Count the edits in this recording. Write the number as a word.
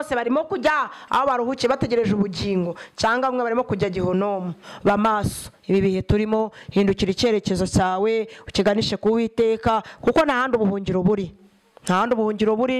one